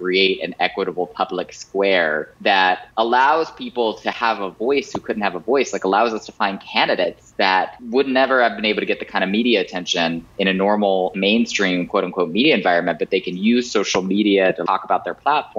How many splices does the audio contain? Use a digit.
5